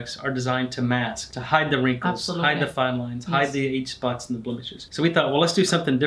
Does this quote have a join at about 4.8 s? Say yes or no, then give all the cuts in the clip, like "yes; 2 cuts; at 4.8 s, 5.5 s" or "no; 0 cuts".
yes; 2 cuts; at 1.3 s, 4.8 s